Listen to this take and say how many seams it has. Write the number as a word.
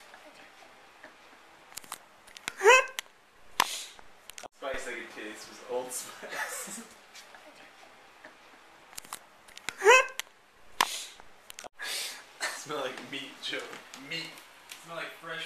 two